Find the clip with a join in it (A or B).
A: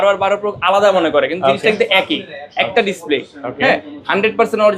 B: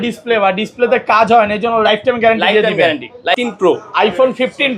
B